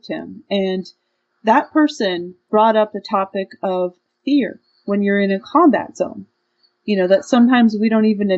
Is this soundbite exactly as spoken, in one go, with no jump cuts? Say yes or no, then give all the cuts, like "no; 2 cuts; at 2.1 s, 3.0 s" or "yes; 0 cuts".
no; 1 cut; at 2.4 s